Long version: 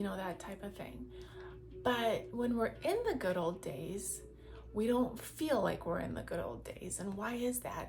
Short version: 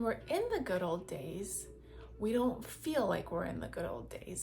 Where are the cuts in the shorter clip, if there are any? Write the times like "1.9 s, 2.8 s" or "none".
none